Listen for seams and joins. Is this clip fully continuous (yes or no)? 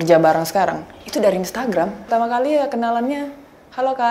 no